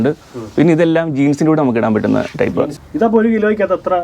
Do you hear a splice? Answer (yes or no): yes